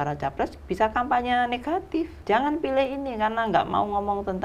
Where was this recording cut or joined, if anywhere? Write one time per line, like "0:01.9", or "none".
0:02.1